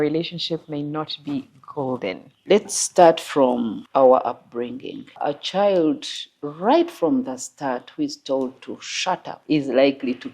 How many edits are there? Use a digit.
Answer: 4